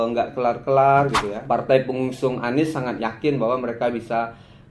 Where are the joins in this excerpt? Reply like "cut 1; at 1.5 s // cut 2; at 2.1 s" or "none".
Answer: cut 1; at 1.3 s